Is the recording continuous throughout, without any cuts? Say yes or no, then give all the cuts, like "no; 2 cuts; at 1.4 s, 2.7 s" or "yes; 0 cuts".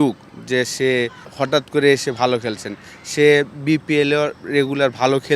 yes; 0 cuts